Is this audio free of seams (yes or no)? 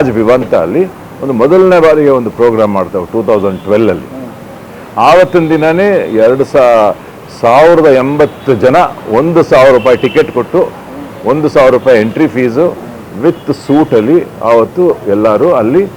yes